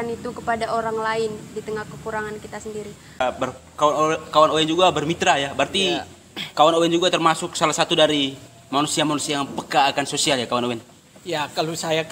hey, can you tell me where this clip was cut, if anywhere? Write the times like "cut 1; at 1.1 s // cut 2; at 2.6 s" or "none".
cut 1; at 3.2 s